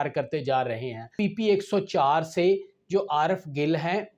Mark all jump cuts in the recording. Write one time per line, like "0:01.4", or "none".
0:01.1